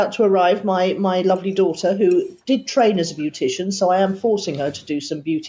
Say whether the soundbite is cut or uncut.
uncut